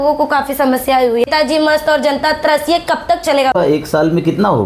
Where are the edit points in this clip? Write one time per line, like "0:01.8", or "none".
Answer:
0:01.3
0:03.5